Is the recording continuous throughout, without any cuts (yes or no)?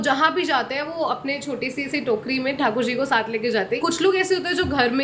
no